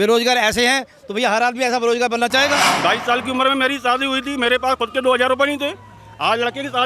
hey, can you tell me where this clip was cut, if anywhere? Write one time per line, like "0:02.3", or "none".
0:02.7